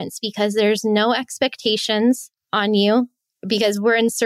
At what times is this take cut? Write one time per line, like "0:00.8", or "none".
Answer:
0:02.4
0:03.1